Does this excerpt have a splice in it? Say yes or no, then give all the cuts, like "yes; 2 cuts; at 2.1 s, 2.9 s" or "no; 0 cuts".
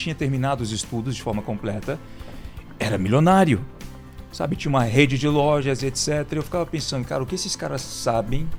no; 0 cuts